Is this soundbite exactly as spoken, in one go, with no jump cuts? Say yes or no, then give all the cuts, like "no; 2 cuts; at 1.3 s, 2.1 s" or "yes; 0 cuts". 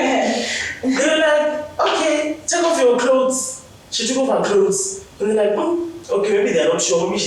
yes; 0 cuts